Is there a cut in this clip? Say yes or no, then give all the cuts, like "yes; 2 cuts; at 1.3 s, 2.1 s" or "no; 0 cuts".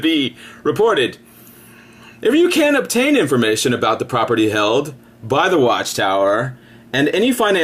yes; 1 cut; at 1.1 s